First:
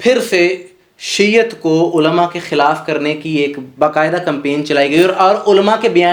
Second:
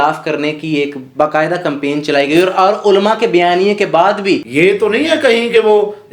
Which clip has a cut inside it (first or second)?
second